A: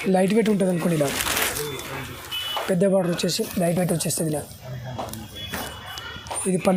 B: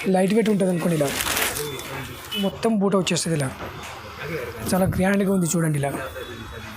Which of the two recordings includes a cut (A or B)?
B